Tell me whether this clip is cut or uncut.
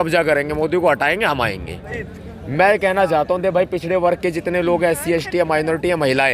cut